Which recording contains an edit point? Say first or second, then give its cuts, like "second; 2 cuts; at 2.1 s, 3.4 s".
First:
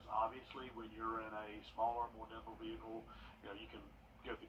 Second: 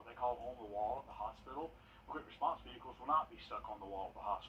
second; 1 cut; at 1.7 s